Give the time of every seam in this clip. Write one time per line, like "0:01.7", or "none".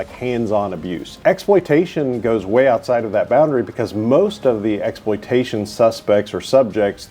0:01.1

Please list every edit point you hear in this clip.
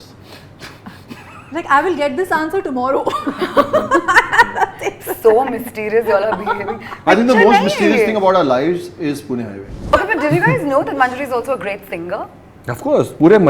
0:09.8

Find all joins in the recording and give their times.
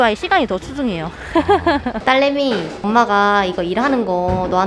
0:02.0

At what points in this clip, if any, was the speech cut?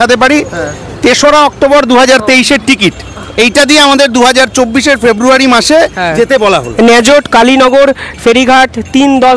none

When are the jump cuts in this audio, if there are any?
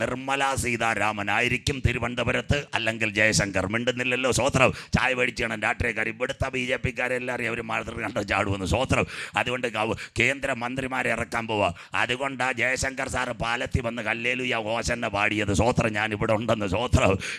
none

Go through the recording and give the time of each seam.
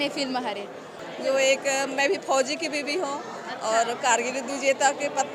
0:00.9

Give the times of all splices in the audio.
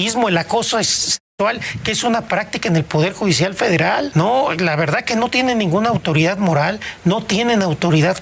0:04.1

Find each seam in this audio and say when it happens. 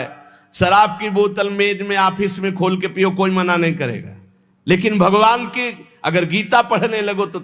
none

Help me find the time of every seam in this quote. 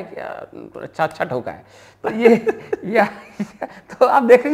none

